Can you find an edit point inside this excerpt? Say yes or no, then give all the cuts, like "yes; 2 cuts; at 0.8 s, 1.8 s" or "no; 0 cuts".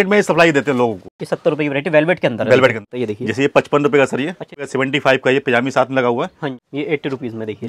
yes; 4 cuts; at 1.2 s, 2.9 s, 4.7 s, 6.6 s